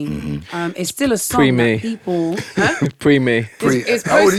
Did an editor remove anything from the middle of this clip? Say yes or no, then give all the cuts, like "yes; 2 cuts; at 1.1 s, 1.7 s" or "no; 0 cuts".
no; 0 cuts